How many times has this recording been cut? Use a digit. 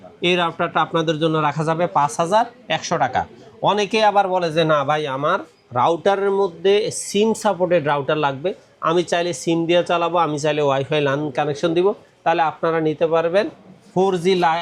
0